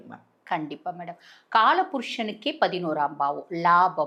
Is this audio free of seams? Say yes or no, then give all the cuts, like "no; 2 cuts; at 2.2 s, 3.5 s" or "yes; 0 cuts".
yes; 0 cuts